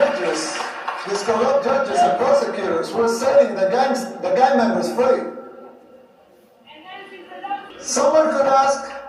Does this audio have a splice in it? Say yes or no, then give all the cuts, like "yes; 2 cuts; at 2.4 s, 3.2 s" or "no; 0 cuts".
yes; 1 cut; at 7.7 s